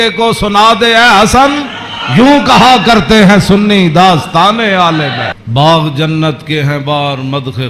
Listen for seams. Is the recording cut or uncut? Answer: cut